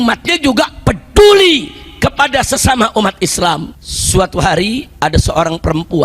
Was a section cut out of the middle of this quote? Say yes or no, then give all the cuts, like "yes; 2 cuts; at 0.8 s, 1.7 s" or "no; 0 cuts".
yes; 1 cut; at 3.7 s